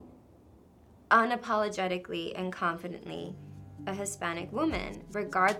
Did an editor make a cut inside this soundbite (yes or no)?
no